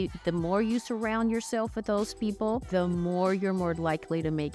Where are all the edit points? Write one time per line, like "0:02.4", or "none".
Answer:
0:02.6